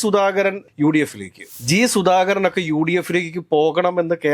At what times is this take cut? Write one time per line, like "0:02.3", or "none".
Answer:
0:01.5